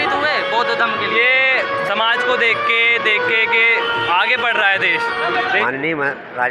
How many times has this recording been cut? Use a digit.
1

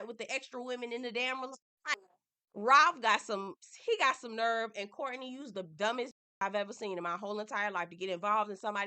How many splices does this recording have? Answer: 1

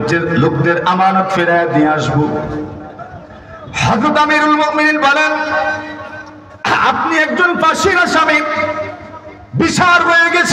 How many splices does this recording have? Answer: 0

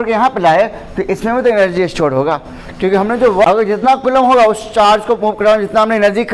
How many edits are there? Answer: 1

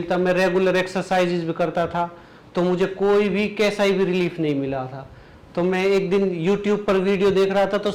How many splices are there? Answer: 0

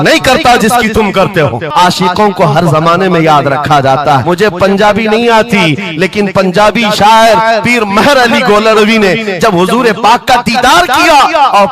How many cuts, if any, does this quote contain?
2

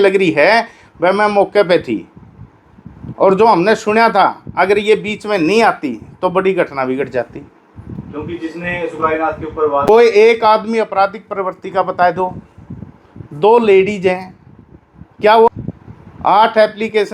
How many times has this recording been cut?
2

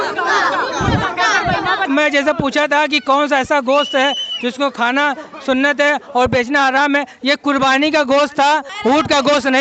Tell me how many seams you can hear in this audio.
2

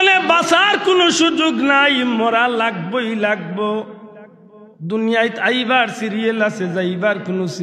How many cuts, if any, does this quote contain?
0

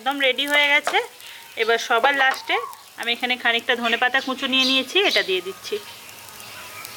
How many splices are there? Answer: 0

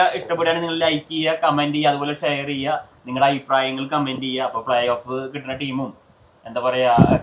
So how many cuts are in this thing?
0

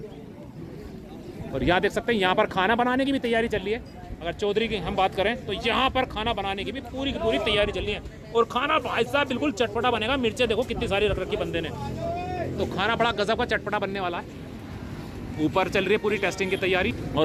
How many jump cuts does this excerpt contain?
0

